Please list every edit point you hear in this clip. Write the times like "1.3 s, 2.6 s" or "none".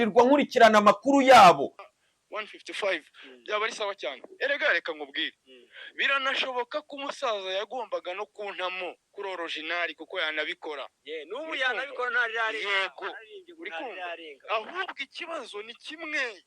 1.7 s